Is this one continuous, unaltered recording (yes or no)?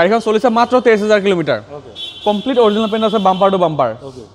yes